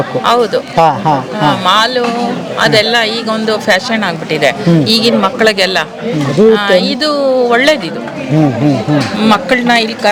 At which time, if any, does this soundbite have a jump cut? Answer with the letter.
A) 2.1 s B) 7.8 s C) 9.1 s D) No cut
D